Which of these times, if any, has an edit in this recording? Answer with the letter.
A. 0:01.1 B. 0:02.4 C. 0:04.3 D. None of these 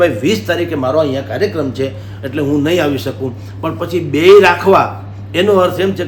D